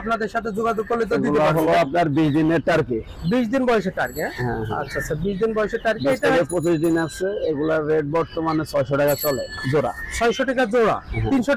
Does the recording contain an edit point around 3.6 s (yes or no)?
no